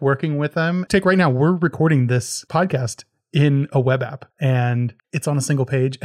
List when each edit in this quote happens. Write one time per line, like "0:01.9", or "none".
0:00.8
0:02.4
0:04.2
0:05.0